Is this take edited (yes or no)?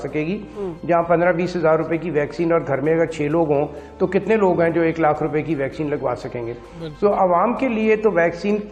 no